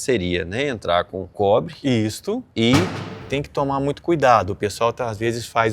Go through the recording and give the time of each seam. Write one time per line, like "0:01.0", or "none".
0:01.2
0:02.5
0:03.2